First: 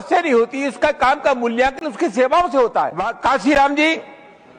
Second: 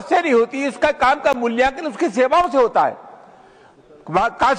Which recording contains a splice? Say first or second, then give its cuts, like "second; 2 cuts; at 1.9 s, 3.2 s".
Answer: first; 1 cut; at 3.0 s